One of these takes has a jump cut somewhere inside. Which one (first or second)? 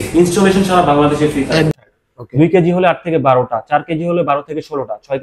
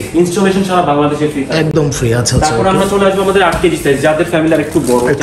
first